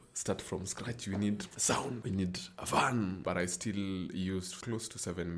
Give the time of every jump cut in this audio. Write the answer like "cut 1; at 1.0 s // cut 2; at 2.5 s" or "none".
cut 1; at 3.2 s // cut 2; at 4.6 s